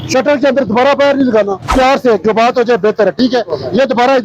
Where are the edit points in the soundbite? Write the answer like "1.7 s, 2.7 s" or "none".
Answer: 1.7 s